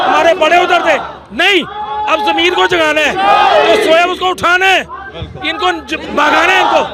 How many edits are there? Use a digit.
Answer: 0